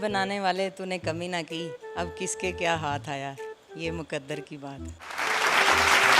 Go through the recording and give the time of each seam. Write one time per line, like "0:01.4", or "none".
none